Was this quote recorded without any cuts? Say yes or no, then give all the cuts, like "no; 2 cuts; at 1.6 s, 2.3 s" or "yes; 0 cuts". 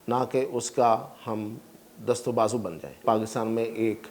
no; 1 cut; at 3.0 s